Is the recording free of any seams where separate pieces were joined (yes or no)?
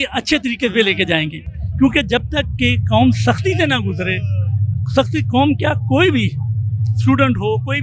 yes